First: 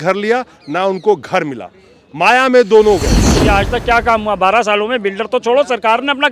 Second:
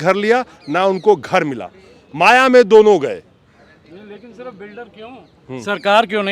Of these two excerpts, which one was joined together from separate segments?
first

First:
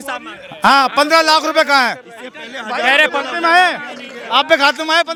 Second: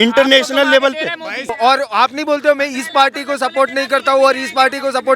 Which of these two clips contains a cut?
second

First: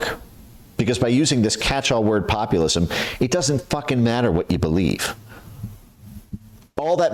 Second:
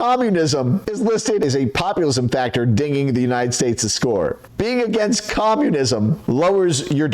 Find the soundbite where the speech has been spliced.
second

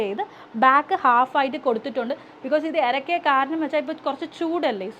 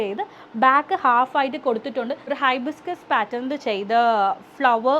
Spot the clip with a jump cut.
second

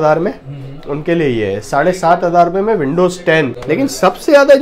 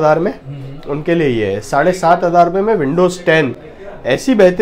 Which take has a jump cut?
first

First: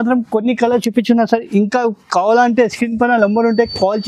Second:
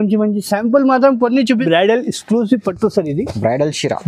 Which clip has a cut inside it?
second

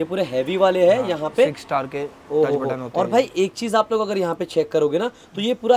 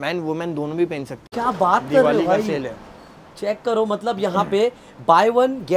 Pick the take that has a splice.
second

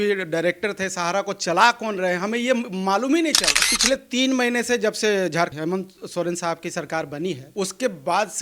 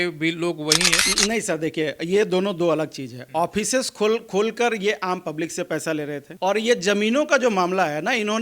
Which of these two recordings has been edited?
second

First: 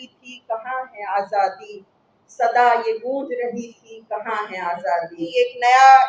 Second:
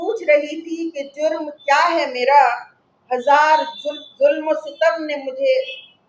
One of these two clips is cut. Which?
first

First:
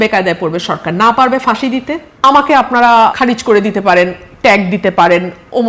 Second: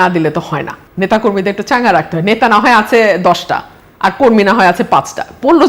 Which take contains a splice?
first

